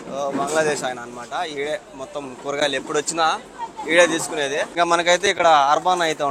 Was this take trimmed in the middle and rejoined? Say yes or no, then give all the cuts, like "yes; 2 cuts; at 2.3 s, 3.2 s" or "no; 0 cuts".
yes; 1 cut; at 4.7 s